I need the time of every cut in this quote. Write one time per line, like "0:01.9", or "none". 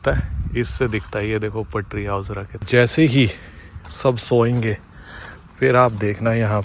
0:02.6

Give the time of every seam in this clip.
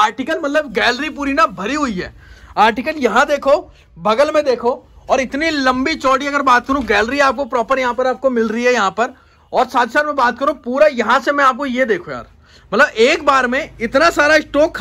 none

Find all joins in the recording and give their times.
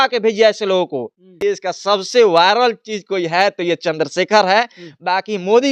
0:01.2

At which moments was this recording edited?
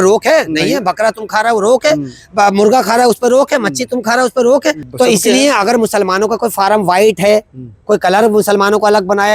0:04.8

